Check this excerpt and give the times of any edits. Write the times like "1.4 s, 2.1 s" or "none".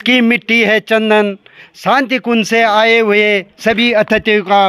none